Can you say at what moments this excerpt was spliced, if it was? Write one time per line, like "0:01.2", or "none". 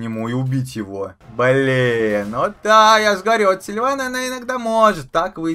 0:01.2
0:02.5